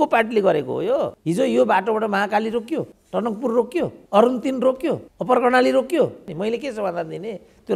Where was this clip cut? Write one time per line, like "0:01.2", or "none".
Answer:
0:01.2
0:03.0
0:04.0
0:05.1
0:06.2